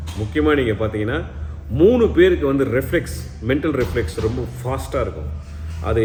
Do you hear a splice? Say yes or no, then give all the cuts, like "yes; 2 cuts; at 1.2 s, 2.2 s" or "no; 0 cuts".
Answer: no; 0 cuts